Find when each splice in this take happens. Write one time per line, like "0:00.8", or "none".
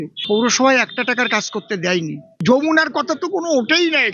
0:02.3